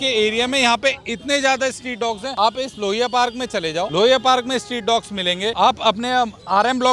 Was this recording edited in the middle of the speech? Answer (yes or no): yes